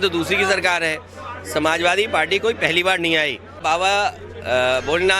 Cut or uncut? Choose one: cut